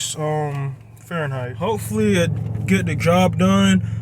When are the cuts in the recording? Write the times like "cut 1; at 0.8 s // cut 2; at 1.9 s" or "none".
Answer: cut 1; at 1.5 s

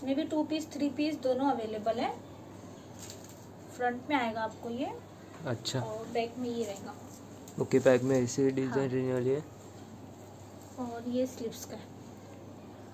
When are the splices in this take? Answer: none

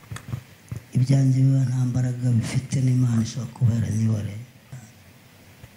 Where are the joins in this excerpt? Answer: cut 1; at 4.7 s

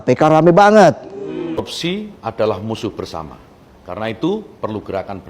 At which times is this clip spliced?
cut 1; at 1.7 s

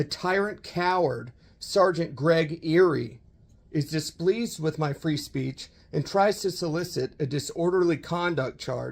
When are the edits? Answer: none

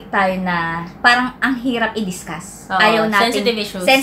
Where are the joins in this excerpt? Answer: none

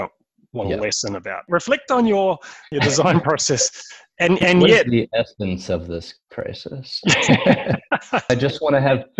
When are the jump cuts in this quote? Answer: cut 1; at 1.4 s // cut 2; at 2.7 s // cut 3; at 8.3 s

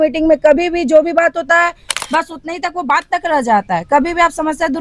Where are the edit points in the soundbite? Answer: none

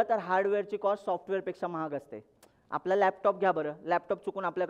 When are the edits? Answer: none

